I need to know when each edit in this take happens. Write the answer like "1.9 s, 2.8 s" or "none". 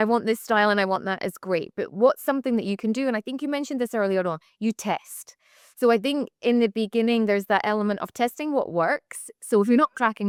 none